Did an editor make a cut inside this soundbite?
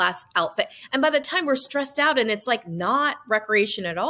no; 0 cuts

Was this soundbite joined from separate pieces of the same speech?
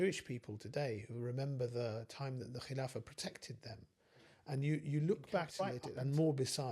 yes; 1 cut; at 5.5 s

